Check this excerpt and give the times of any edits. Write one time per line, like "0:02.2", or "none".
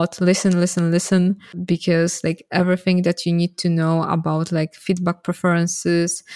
0:01.5